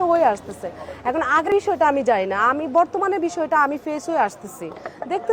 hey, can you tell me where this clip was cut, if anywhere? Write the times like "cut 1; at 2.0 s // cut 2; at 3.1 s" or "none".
cut 1; at 1.5 s